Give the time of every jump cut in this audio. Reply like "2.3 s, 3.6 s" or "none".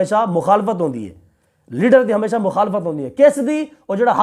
none